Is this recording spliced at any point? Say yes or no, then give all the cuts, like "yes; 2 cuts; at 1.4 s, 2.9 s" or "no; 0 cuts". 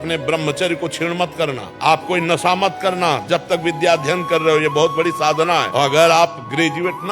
yes; 2 cuts; at 1.7 s, 5.7 s